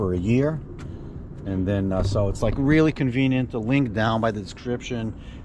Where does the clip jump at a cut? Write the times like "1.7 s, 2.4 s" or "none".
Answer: none